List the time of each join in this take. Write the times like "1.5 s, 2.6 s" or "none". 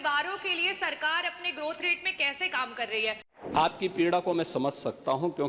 3.3 s